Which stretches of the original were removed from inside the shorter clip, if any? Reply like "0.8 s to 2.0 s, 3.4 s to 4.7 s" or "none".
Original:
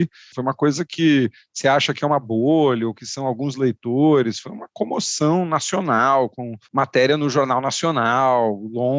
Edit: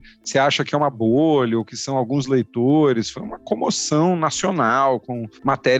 none

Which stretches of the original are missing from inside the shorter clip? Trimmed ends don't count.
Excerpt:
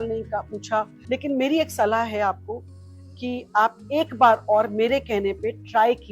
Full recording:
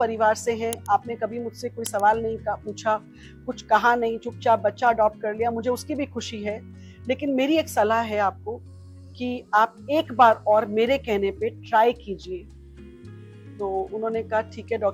3.1 s to 6.9 s

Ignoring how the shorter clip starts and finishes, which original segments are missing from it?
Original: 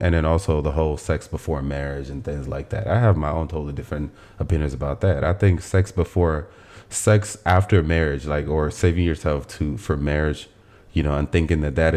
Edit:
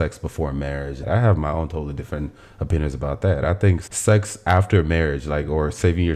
2.1 s to 2.8 s, 5.6 s to 6.8 s

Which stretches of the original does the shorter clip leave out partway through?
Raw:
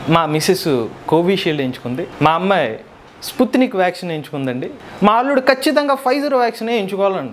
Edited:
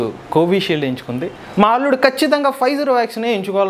2.1 s to 4.8 s

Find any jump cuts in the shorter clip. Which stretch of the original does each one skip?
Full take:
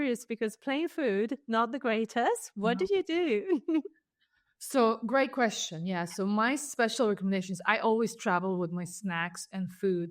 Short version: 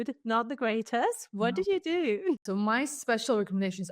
3.6 s to 6.1 s

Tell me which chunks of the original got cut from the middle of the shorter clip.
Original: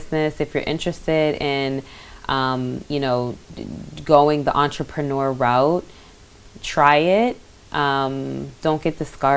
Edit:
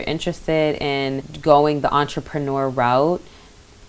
1.9 s to 3.9 s

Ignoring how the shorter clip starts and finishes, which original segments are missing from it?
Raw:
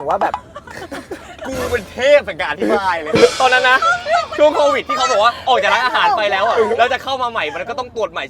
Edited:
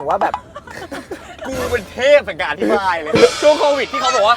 3.3 s to 4.3 s

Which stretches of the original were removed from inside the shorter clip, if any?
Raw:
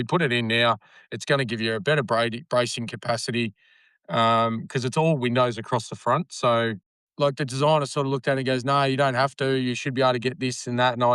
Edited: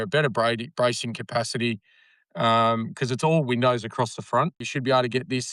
6.4 s to 9.7 s

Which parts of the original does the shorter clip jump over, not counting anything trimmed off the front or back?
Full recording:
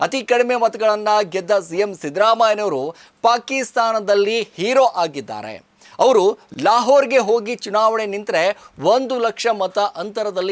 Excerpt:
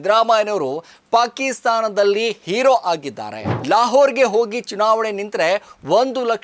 5.6 s to 6.5 s

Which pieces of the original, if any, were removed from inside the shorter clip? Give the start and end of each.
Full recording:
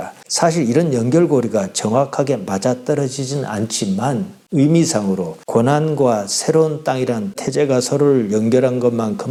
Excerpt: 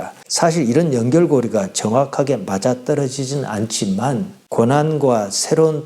4.4 s to 5.3 s

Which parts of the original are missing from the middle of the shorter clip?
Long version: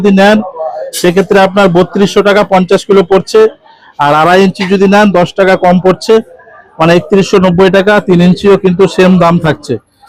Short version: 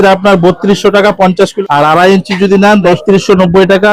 2.9 s to 3.8 s, 5.3 s to 7.0 s

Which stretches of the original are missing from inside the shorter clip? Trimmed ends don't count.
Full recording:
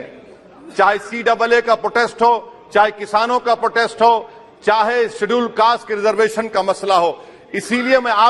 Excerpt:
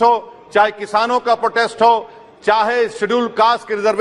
none

